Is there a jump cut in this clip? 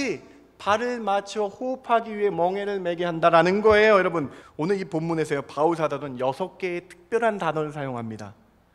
yes; 1 cut; at 4.4 s

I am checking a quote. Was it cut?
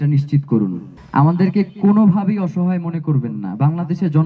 yes; 1 cut; at 0.9 s

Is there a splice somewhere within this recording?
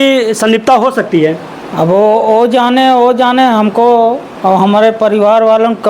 no; 0 cuts

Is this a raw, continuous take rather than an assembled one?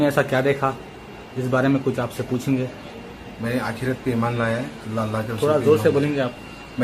yes; 0 cuts

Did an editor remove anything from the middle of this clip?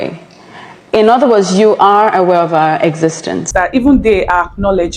yes; 1 cut; at 3.5 s

